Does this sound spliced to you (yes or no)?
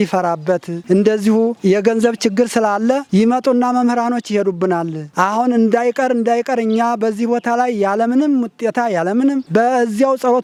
no